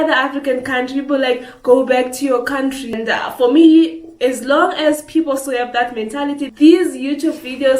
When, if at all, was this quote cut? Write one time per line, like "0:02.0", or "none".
0:03.0
0:06.4